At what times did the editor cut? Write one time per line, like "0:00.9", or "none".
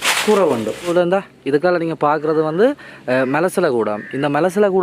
0:00.9